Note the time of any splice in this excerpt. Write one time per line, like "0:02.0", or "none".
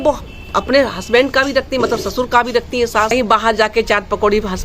0:03.1